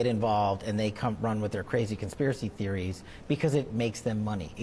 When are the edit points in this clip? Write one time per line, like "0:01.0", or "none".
0:03.2